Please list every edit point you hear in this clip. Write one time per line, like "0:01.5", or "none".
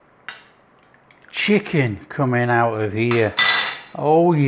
none